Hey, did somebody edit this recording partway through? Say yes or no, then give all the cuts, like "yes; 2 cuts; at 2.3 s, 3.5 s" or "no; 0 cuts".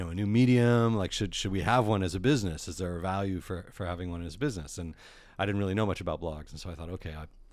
no; 0 cuts